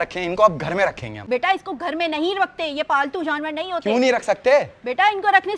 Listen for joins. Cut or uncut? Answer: uncut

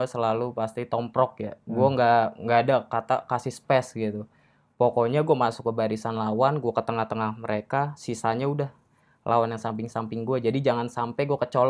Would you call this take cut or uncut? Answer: uncut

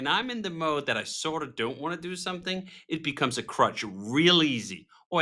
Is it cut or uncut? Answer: uncut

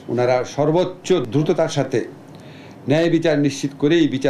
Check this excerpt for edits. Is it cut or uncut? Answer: cut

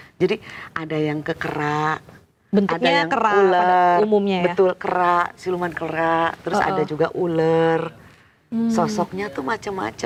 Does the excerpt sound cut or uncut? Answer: uncut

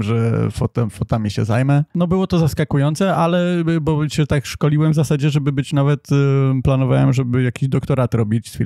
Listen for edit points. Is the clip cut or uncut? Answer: cut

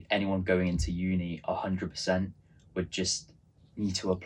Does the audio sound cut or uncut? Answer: uncut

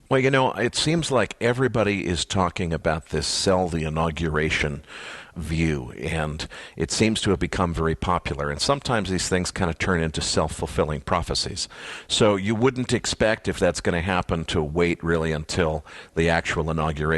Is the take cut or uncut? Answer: cut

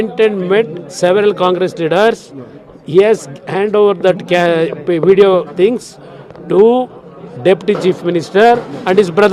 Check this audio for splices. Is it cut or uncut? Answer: uncut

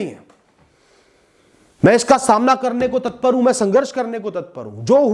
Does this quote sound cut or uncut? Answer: uncut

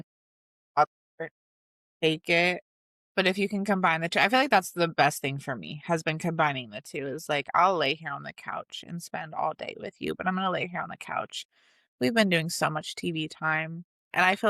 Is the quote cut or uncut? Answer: uncut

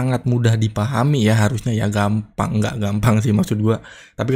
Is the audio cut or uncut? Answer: uncut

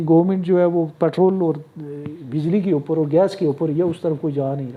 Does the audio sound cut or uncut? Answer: uncut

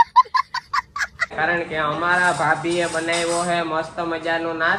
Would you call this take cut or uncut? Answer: cut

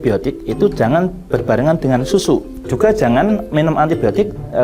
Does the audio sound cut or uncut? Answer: cut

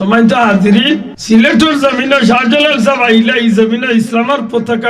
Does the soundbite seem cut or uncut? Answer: cut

